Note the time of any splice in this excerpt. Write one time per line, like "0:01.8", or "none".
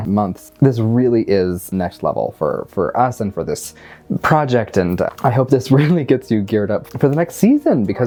none